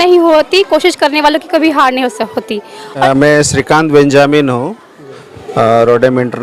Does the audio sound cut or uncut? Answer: cut